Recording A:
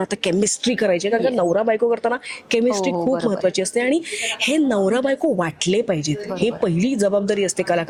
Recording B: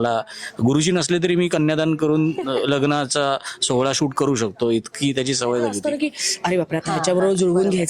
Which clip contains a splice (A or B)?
B